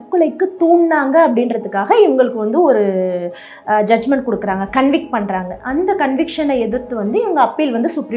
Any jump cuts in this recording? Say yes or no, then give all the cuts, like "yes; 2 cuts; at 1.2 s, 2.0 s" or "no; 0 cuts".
no; 0 cuts